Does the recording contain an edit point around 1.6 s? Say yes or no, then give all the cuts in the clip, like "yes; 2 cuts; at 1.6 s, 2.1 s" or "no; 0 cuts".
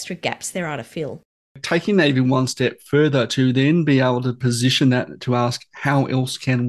yes; 1 cut; at 1.6 s